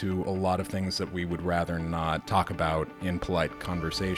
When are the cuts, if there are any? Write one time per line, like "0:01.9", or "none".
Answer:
0:02.2
0:02.9